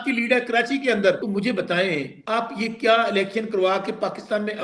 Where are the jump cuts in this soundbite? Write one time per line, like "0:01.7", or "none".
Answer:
0:01.2
0:02.1